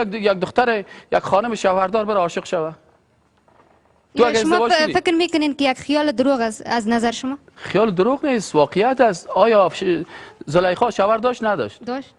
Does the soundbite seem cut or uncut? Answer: uncut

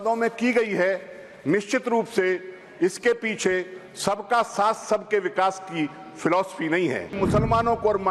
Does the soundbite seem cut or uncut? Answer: cut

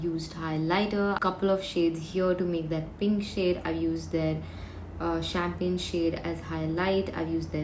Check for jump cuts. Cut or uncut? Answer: cut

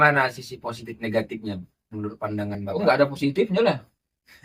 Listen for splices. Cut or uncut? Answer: uncut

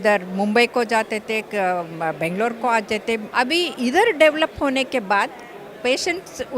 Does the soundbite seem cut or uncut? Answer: cut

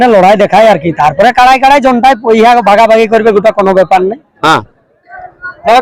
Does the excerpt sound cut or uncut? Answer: cut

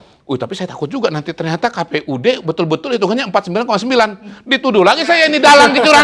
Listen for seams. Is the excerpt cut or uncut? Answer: uncut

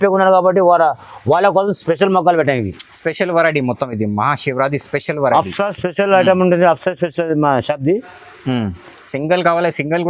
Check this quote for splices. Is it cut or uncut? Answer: uncut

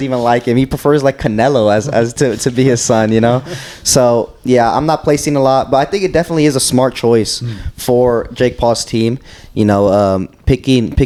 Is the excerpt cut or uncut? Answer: uncut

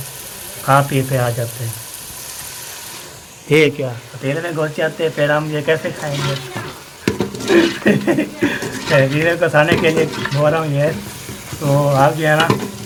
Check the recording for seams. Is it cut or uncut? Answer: uncut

